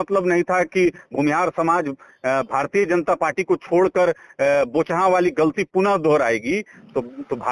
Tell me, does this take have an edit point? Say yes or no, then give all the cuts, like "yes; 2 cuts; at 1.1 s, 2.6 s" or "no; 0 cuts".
no; 0 cuts